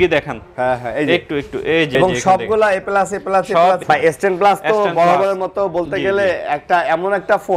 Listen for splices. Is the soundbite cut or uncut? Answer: cut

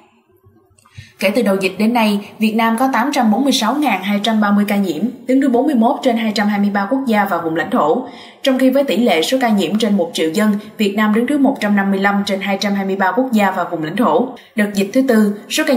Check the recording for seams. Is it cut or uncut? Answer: cut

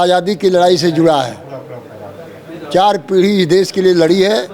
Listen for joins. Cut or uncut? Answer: uncut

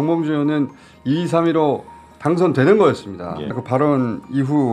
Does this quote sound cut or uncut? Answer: cut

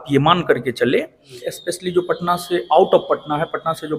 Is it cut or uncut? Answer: cut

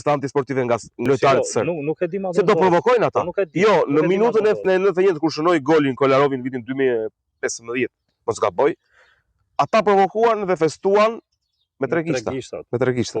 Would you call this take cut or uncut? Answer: cut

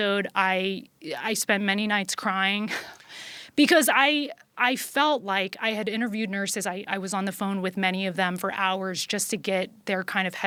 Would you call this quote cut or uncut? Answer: uncut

